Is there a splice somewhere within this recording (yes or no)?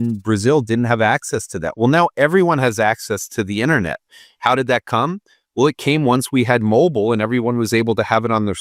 no